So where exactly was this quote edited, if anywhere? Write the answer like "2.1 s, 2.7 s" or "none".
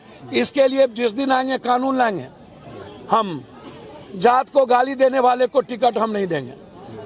none